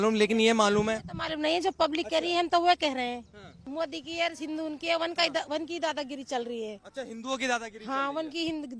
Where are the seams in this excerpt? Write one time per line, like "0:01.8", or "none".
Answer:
0:03.6